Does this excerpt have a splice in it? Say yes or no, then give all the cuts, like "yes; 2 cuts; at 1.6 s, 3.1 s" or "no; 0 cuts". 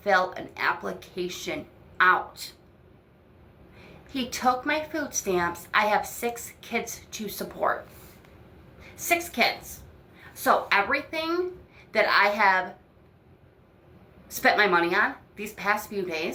no; 0 cuts